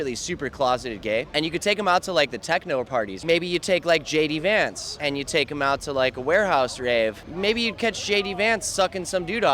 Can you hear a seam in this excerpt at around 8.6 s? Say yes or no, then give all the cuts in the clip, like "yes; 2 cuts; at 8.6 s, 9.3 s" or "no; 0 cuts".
no; 4 cuts; at 1.3 s, 3.2 s, 4.9 s, 7.2 s